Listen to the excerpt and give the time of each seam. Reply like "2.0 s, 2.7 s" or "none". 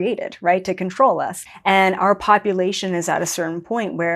1.5 s